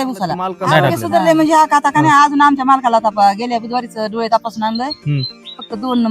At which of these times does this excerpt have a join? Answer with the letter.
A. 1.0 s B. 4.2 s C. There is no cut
A